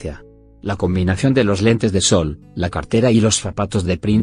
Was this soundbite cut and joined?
no; 0 cuts

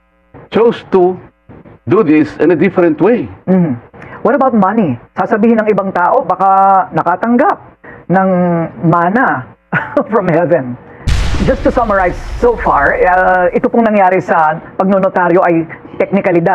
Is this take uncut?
no; 1 cut; at 11.3 s

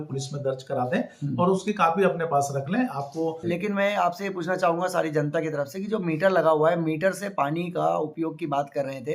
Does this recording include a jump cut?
yes; 1 cut; at 3.4 s

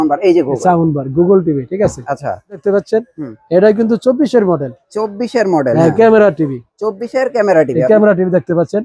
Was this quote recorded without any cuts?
no; 1 cut; at 2.6 s

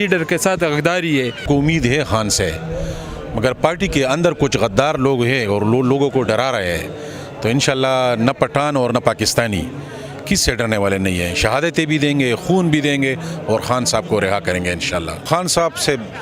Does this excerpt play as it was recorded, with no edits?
no; 2 cuts; at 1.4 s, 15.3 s

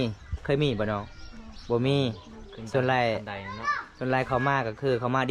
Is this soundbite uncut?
yes; 0 cuts

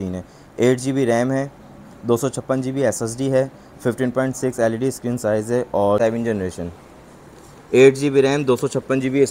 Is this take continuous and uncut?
no; 1 cut; at 5.9 s

